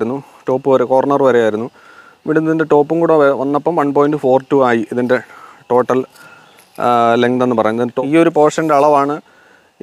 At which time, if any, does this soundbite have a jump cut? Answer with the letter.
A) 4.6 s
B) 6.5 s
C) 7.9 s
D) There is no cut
C